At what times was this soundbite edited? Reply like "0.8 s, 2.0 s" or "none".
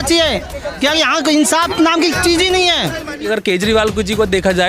3.2 s

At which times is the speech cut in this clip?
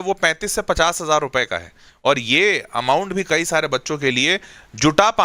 none

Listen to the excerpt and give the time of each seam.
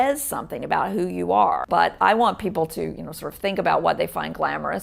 1.6 s

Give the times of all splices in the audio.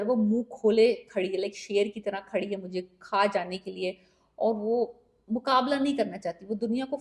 none

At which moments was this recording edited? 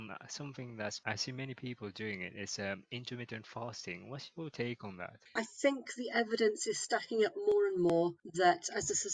5.2 s

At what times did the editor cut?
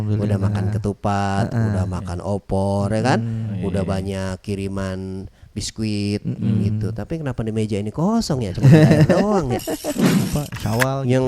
10.0 s

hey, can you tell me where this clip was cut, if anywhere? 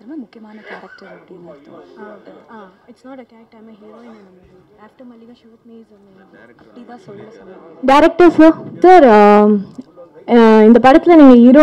7.7 s, 8.7 s

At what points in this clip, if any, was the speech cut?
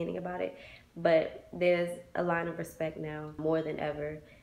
3.4 s

